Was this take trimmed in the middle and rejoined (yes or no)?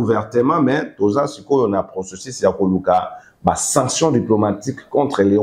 no